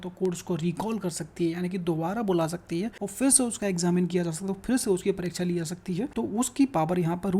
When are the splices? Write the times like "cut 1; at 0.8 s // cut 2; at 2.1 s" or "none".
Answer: cut 1; at 3.0 s // cut 2; at 6.1 s